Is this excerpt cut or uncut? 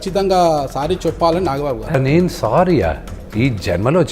cut